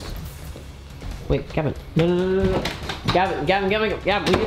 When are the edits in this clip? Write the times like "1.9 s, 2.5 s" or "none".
none